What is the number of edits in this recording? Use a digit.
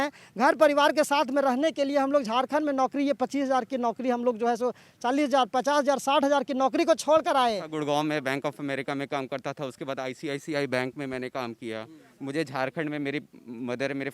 1